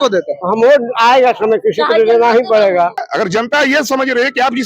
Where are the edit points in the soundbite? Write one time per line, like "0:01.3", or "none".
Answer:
0:03.1

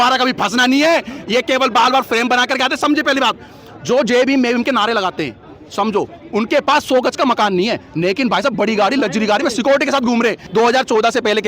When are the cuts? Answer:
0:10.4

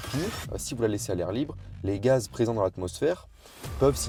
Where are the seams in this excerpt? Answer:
none

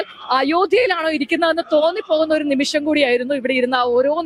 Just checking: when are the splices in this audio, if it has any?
none

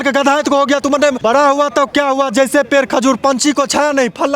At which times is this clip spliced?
0:01.2

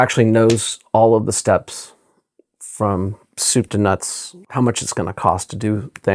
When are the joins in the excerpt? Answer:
0:04.3

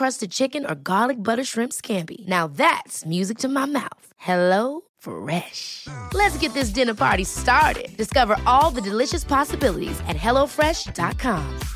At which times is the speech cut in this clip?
none

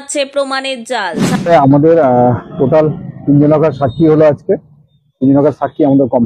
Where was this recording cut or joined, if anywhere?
0:01.3

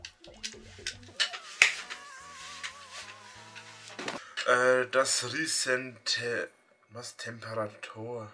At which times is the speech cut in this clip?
0:04.2

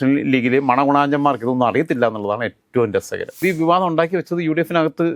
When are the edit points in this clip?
0:03.3

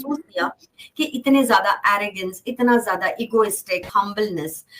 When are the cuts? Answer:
0:03.9

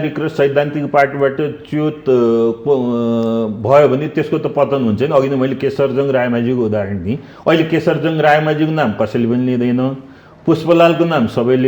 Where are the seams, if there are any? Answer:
none

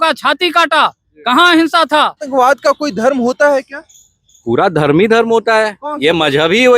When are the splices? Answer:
0:02.2

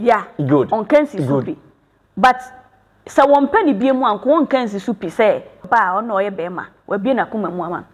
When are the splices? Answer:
0:05.6

